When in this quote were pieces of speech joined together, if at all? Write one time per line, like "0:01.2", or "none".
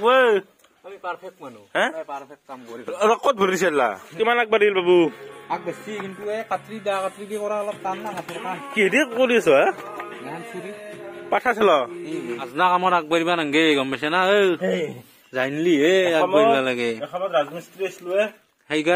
0:04.0
0:12.4